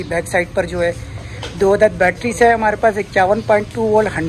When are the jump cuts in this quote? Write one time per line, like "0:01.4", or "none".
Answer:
none